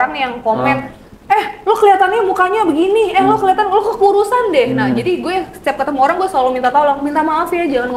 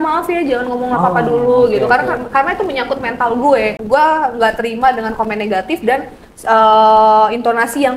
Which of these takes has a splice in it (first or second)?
second